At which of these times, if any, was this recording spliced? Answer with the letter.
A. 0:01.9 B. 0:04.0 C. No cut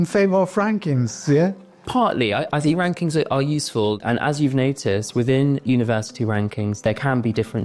B